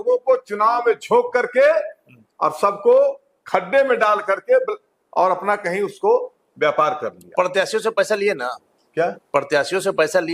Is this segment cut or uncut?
uncut